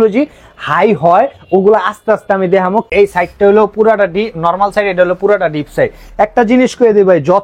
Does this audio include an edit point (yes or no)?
yes